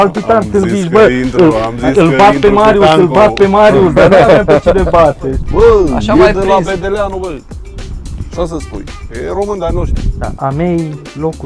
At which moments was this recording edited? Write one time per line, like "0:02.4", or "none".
0:05.3
0:10.2